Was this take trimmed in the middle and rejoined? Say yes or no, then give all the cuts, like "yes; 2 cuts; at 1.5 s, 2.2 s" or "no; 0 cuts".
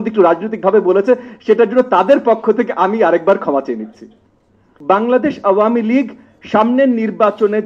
yes; 1 cut; at 4.7 s